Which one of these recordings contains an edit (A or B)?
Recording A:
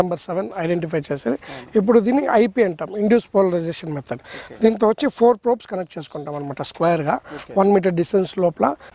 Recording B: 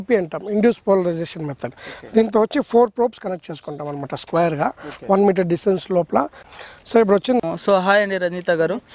B